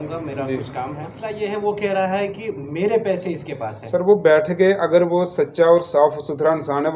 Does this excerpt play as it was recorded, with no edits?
no; 1 cut; at 1.2 s

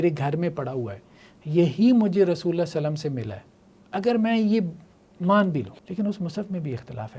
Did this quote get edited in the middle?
yes; 1 cut; at 5.8 s

